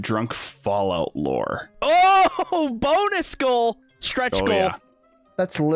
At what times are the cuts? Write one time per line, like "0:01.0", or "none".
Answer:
none